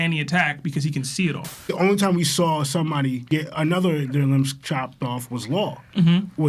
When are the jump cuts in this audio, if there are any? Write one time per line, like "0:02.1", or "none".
0:01.5